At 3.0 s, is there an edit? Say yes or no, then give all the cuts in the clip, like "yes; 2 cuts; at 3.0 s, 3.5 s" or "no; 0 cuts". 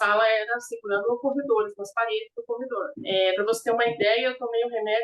yes; 1 cut; at 3.0 s